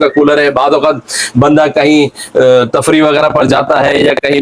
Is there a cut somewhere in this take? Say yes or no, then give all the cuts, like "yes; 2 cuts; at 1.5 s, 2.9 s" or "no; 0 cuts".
no; 0 cuts